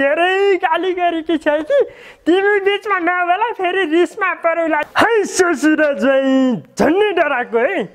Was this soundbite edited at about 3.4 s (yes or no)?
no